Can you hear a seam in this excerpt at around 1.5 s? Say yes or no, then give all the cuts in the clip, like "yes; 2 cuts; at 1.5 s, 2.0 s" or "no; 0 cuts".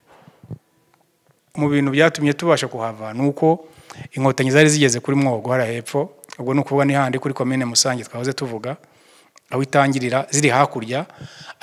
yes; 1 cut; at 1.5 s